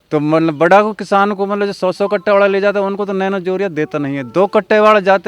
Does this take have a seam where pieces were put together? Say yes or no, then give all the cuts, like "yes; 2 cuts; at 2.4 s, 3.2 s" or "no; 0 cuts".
no; 0 cuts